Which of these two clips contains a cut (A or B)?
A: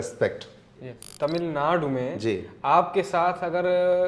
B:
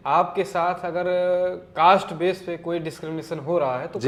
A